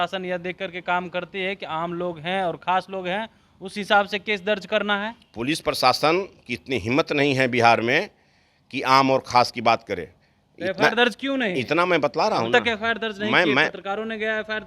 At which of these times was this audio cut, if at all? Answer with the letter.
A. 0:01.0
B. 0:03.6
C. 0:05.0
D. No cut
D